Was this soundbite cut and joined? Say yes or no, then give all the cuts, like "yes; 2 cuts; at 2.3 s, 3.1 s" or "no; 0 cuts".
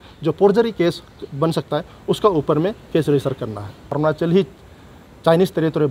yes; 1 cut; at 3.9 s